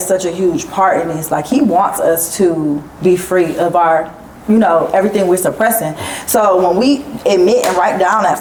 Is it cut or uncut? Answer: uncut